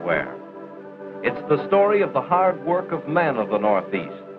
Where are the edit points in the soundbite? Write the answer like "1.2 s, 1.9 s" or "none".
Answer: 2.4 s